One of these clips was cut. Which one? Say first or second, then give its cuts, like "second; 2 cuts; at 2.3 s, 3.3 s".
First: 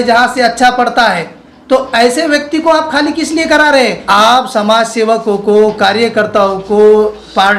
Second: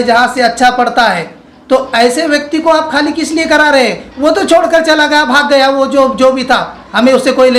first; 1 cut; at 4.0 s